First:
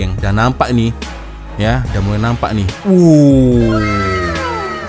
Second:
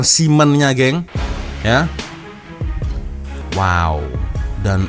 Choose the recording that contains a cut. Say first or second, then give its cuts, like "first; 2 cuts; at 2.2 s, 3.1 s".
second; 1 cut; at 3.4 s